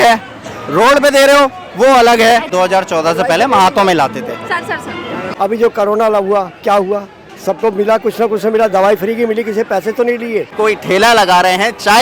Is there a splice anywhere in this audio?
yes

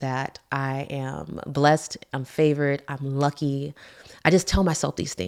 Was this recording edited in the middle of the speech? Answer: no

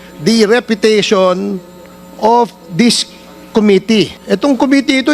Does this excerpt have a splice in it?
yes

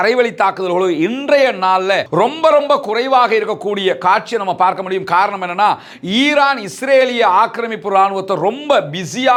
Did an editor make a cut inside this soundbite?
no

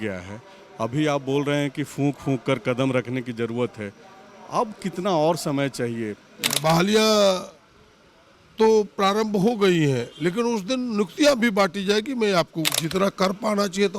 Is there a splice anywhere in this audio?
yes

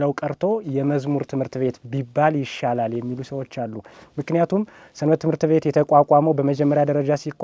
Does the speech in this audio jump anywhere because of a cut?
no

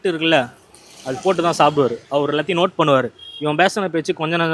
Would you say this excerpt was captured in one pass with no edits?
yes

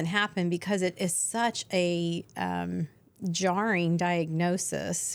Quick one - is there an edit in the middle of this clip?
no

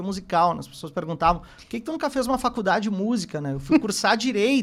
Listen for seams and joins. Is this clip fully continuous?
yes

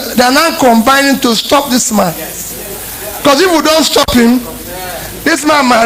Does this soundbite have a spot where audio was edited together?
no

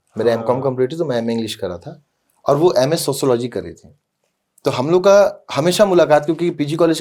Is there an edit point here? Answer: no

